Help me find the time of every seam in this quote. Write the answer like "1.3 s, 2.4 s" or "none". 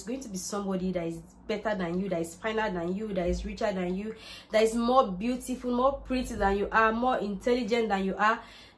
none